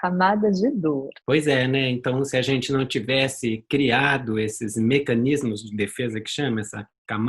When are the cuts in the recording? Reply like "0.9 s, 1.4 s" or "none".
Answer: 1.1 s